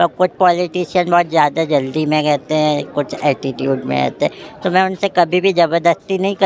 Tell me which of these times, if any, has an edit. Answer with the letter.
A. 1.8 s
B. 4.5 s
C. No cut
C